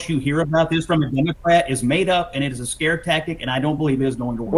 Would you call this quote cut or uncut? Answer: uncut